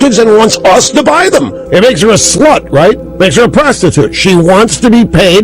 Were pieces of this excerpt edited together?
yes; 2 cuts; at 1.6 s, 3.1 s

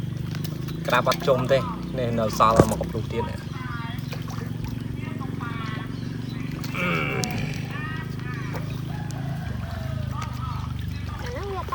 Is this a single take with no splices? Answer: yes; 0 cuts

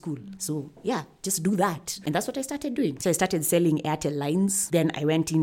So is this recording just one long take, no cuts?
no; 3 cuts; at 2.0 s, 3.0 s, 4.6 s

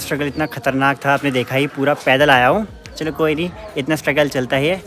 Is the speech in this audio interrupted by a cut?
no; 0 cuts

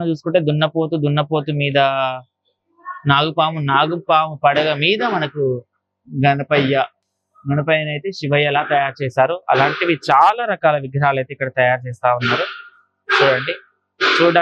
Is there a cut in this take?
no; 0 cuts

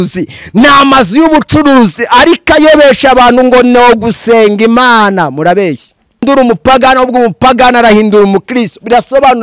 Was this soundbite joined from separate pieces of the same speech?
yes; 1 cut; at 6.2 s

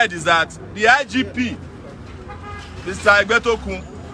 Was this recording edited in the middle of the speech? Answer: no; 0 cuts

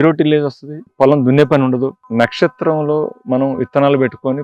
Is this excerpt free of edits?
yes; 0 cuts

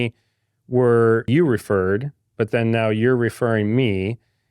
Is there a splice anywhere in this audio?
yes; 1 cut; at 1.3 s

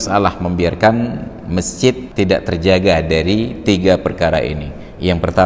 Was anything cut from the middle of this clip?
yes; 1 cut; at 2.1 s

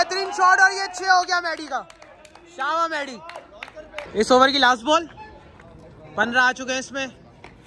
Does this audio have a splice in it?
no; 0 cuts

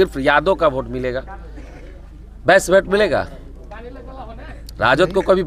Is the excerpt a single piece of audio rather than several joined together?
yes; 0 cuts

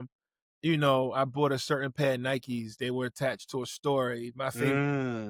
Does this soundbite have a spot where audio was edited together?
no; 0 cuts

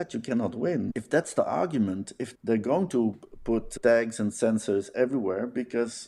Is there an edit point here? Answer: no; 0 cuts

